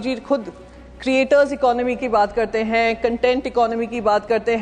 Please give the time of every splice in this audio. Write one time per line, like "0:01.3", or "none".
none